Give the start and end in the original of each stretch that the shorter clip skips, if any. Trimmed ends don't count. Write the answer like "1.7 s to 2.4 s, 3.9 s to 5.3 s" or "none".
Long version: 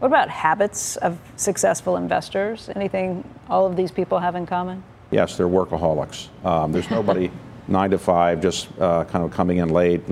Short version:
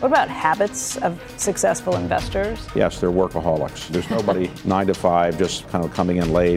2.6 s to 5.0 s, 6.5 s to 7.2 s, 8.7 s to 9.1 s